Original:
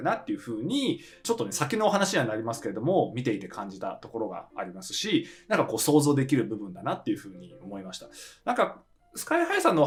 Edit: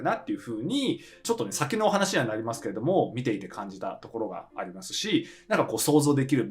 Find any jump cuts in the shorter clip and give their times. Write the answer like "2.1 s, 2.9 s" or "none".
none